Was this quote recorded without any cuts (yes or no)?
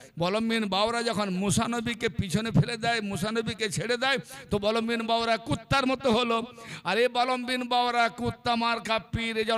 yes